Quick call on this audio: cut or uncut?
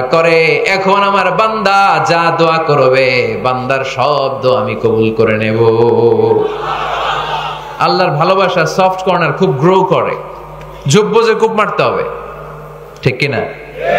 uncut